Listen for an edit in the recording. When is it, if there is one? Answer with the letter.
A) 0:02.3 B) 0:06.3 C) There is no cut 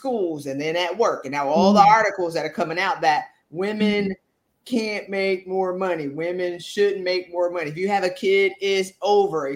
C